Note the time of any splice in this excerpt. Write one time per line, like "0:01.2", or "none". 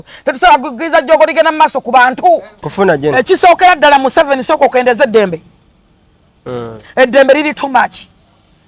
0:02.6